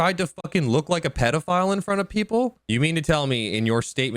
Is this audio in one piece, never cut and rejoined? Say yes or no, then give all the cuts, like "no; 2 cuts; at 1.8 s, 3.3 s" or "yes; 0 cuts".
no; 1 cut; at 2.5 s